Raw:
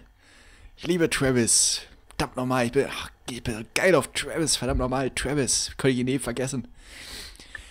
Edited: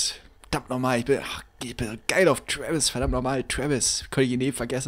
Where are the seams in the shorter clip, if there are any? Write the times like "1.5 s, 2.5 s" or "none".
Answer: none